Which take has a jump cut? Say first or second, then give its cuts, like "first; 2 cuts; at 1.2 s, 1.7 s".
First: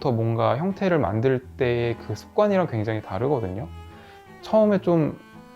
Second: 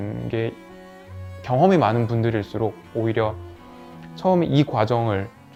first; 1 cut; at 4.1 s